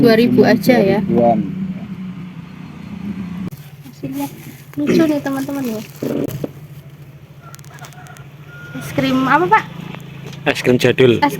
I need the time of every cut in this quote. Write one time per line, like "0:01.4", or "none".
0:03.5